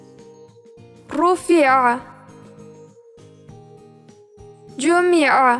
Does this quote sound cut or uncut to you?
uncut